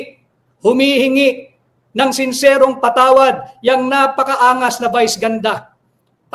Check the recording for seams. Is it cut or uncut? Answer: uncut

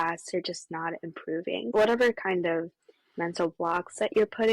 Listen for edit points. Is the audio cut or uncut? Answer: cut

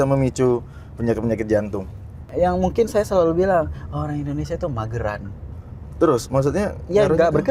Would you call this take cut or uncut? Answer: cut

